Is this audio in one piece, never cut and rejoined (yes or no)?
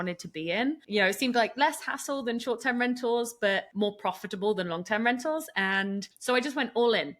no